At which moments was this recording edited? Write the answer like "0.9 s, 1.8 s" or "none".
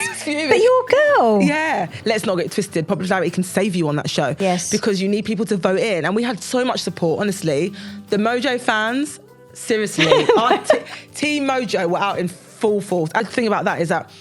2.0 s, 13.2 s

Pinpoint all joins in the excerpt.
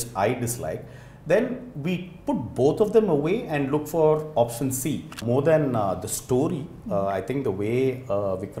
5.2 s

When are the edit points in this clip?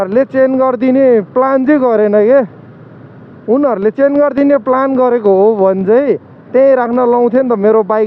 none

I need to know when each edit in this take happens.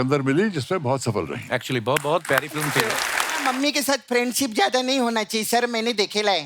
3.4 s

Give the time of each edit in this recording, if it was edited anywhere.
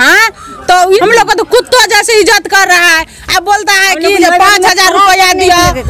1.0 s

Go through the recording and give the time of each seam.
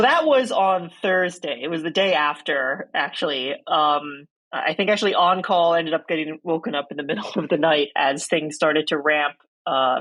none

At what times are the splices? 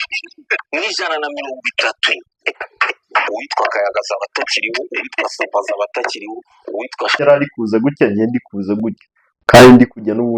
7.2 s

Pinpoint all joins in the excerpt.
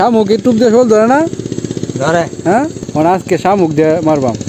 2.8 s

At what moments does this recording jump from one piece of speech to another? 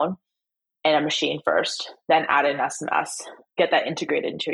none

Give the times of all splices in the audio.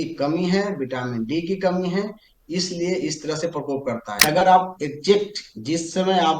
4.2 s

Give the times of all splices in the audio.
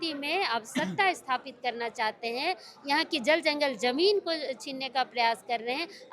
none

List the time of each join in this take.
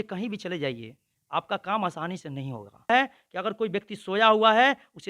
2.9 s

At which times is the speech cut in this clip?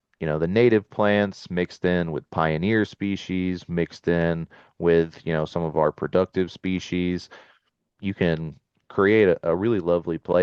none

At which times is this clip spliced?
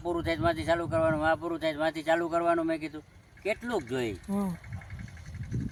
none

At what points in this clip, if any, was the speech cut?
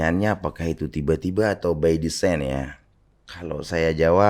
none

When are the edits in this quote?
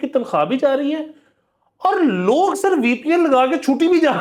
none

